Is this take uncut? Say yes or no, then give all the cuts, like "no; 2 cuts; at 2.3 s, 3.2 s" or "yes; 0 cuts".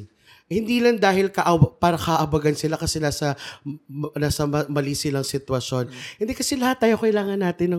yes; 0 cuts